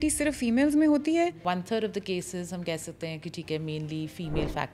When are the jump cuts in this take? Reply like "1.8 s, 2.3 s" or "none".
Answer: 1.4 s